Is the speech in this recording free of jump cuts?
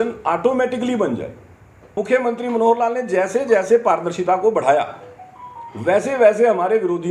no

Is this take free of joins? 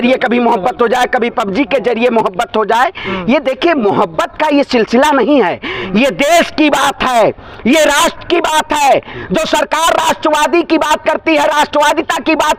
yes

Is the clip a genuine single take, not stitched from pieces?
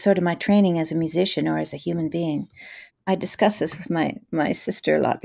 no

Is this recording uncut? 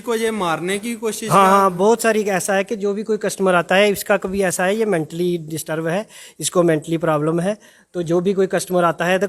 yes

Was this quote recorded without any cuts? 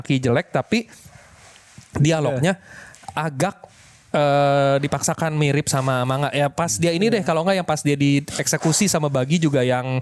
yes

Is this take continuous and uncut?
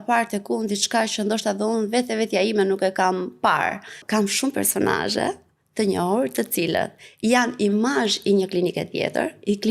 no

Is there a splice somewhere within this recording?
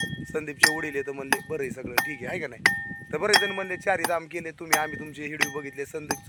no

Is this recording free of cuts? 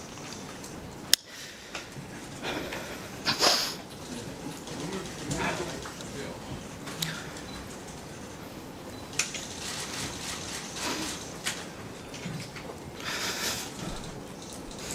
yes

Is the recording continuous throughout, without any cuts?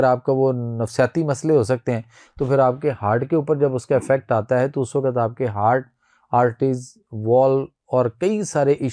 yes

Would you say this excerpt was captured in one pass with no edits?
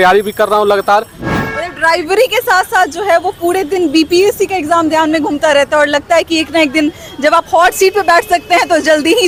yes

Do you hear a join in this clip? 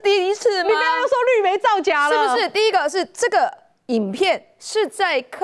no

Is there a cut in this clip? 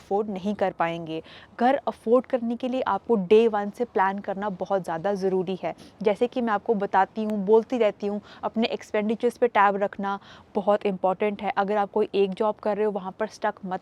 no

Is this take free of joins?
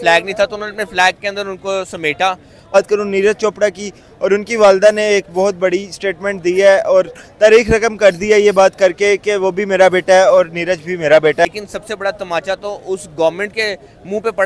no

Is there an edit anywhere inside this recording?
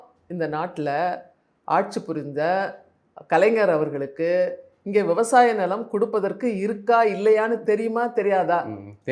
no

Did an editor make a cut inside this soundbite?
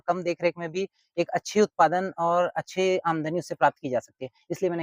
no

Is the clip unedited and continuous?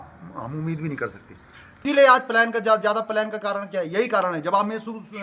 no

